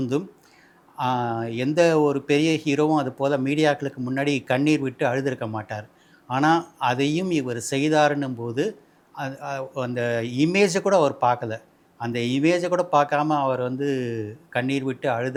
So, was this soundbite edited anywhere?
no; 0 cuts

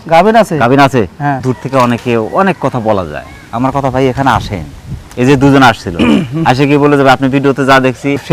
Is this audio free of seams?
no; 1 cut; at 1.4 s

